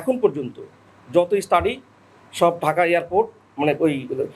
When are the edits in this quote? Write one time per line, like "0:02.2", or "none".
none